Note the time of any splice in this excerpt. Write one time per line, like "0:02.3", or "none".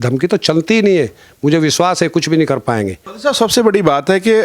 none